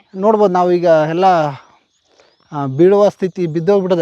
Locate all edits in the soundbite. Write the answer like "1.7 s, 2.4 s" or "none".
none